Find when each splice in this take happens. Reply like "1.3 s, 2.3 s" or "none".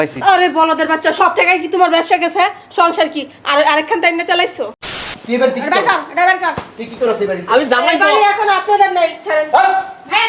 5.0 s

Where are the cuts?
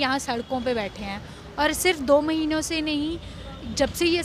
none

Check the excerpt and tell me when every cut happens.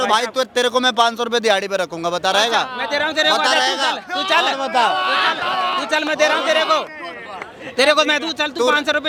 none

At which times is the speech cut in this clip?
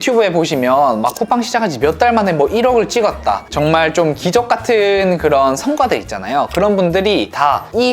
3.5 s

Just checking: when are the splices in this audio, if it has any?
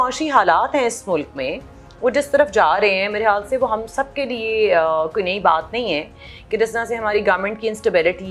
none

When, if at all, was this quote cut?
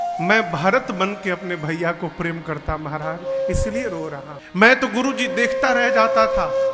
4.3 s

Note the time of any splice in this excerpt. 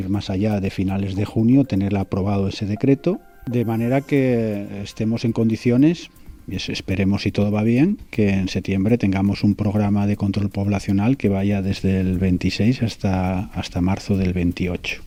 none

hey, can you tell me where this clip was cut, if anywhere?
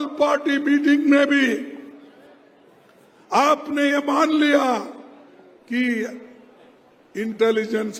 none

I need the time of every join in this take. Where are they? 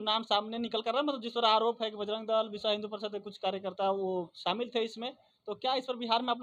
none

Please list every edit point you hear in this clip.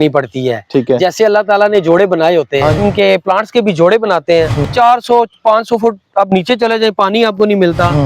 2.8 s, 4.7 s

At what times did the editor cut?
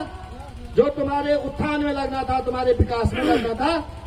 none

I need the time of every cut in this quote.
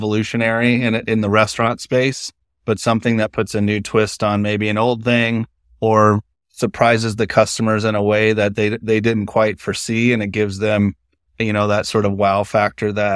none

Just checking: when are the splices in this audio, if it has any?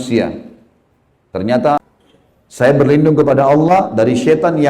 1.8 s

